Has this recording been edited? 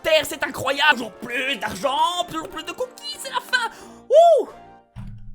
yes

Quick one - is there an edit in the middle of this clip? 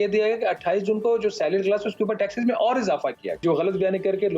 yes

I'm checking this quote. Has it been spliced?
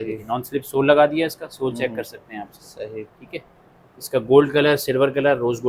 no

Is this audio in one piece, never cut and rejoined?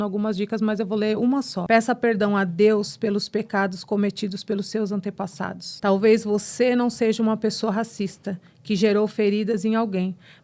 no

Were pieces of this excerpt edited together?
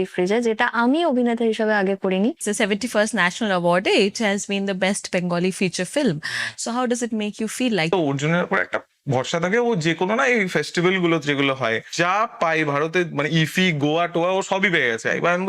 yes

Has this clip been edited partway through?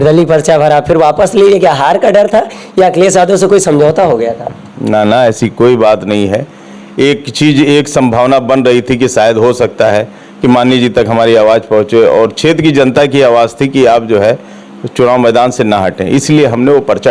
no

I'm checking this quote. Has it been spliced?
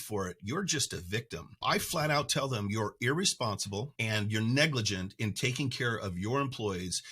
yes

